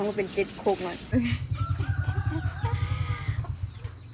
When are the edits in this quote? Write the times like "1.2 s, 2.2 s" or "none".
1.1 s